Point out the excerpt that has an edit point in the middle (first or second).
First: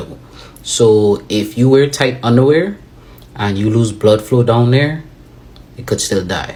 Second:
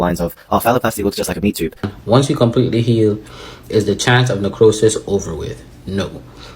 second